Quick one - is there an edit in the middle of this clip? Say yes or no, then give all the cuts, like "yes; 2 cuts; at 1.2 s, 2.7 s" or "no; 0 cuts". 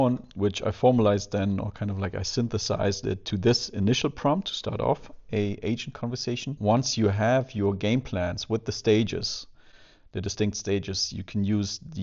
yes; 1 cut; at 6.5 s